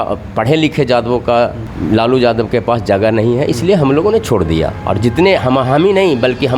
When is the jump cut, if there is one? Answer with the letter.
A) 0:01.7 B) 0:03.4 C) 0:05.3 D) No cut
A